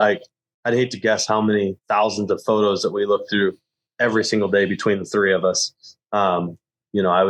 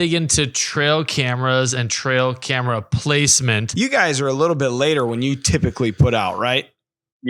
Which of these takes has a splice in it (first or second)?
second